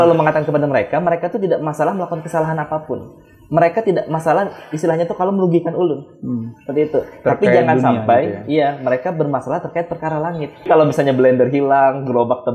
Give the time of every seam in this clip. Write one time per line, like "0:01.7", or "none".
0:10.7